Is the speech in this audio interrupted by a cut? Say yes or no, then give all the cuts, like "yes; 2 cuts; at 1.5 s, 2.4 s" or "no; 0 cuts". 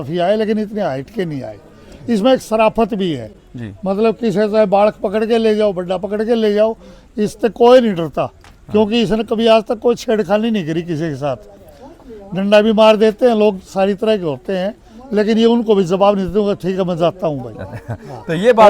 no; 0 cuts